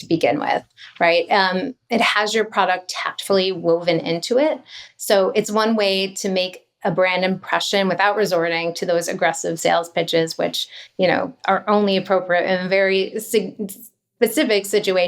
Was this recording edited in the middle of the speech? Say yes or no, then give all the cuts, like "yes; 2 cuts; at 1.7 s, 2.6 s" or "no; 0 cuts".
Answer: yes; 1 cut; at 11.3 s